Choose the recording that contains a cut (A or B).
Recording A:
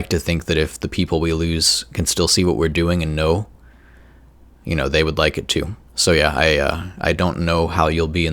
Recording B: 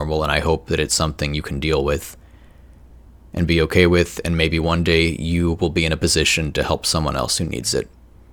A